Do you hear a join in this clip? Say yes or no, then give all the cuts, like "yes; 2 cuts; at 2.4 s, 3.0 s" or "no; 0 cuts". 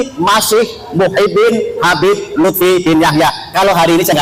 no; 0 cuts